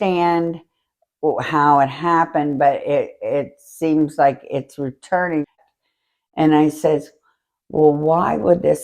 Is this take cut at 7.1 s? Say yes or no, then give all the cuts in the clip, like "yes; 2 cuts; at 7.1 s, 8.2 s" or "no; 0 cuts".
no; 1 cut; at 5.6 s